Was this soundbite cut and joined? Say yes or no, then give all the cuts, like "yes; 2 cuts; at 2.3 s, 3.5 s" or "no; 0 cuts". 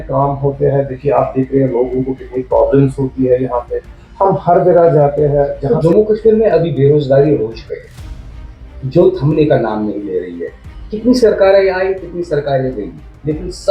yes; 1 cut; at 5.6 s